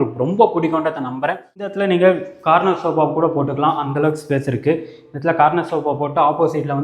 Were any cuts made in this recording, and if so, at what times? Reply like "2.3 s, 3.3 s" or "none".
1.7 s